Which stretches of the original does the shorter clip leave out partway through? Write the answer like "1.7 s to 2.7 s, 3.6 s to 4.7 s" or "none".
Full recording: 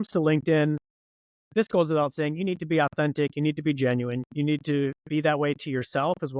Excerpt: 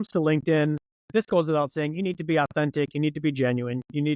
0.9 s to 1.3 s